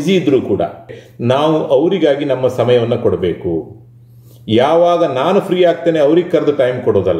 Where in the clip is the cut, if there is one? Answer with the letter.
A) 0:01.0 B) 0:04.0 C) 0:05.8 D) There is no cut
A